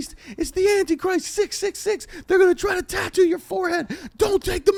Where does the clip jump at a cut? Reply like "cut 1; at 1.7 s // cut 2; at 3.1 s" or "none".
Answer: none

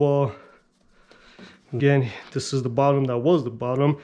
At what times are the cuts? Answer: cut 1; at 1.8 s

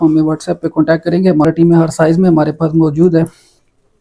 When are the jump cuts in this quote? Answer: cut 1; at 1.5 s

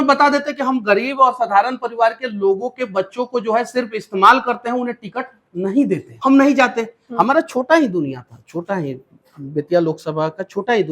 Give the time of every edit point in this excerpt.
cut 1; at 6.1 s

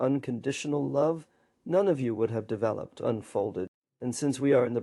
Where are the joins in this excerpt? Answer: cut 1; at 3.8 s

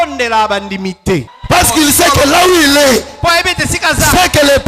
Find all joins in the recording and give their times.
cut 1; at 1.3 s

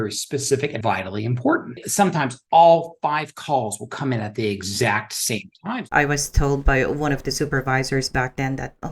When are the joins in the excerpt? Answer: cut 1; at 0.8 s // cut 2; at 1.8 s // cut 3; at 5.7 s

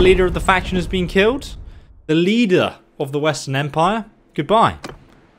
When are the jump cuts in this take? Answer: none

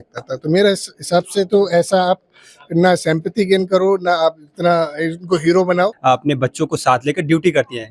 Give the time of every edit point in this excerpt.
cut 1; at 6.0 s

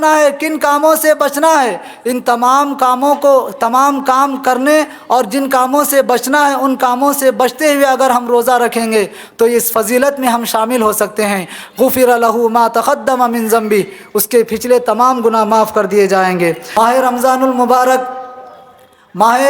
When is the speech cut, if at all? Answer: cut 1; at 16.6 s

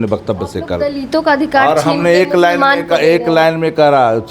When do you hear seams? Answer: none

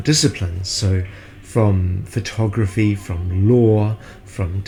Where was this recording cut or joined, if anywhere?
none

